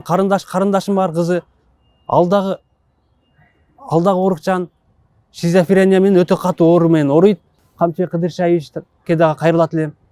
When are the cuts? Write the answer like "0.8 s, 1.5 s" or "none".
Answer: 7.6 s